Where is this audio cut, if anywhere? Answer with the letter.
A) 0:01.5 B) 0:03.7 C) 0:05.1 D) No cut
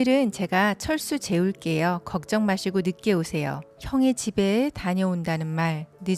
B